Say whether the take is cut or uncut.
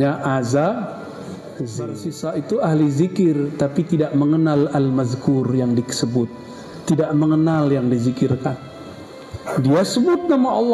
cut